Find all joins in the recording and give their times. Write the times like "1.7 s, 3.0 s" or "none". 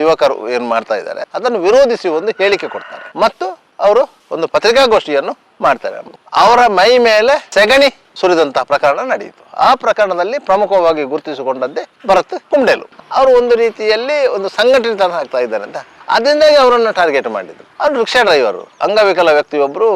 6.0 s, 12.9 s